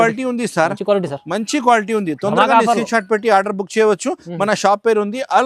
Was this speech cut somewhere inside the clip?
no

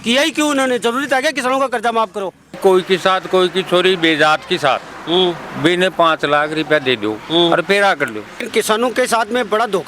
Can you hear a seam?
yes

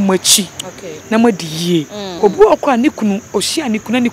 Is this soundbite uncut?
no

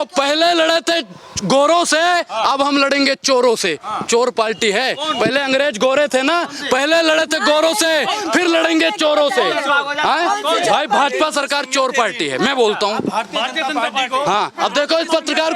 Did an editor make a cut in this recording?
no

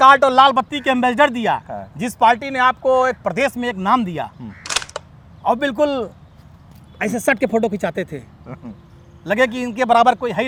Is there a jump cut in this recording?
no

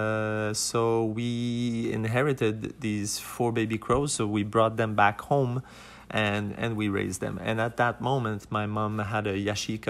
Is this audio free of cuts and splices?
yes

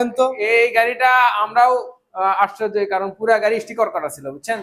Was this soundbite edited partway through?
no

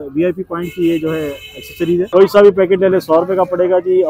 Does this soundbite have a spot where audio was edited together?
yes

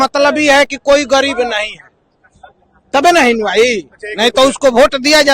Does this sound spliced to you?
no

